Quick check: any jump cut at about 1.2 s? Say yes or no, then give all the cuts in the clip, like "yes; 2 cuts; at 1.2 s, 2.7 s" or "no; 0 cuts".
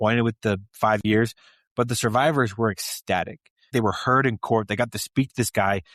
no; 1 cut; at 3.7 s